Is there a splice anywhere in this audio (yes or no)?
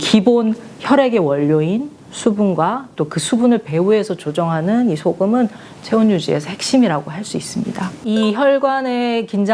yes